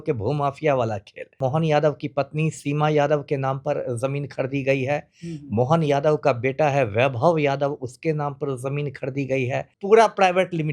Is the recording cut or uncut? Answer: cut